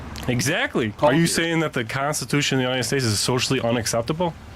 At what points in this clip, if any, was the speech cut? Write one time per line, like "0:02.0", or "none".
0:01.0